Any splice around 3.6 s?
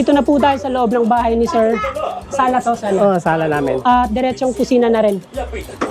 no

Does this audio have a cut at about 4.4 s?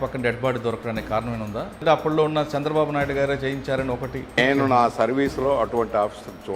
yes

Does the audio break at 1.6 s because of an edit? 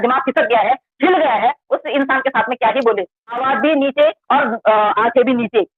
no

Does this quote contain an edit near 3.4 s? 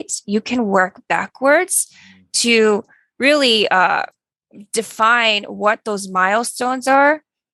no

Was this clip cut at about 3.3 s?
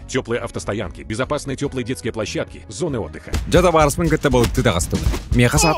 yes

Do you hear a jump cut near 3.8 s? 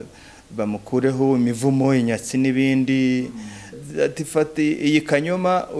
yes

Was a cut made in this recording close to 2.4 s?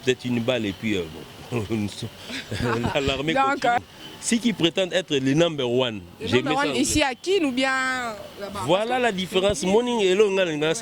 no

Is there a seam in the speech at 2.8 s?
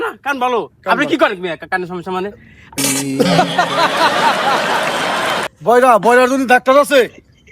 yes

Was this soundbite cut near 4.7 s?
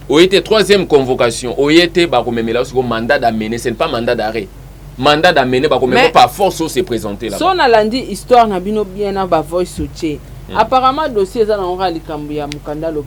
no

